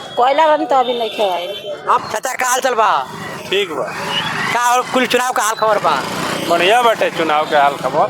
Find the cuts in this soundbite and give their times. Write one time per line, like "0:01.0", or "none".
0:02.0